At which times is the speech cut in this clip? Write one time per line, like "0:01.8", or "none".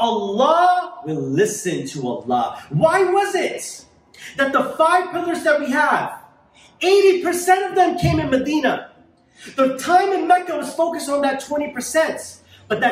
none